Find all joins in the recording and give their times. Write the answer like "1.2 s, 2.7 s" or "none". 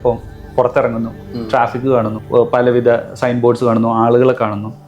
2.2 s